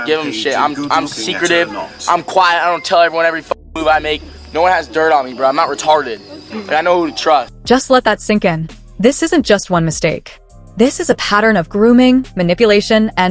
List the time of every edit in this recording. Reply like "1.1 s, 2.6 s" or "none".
none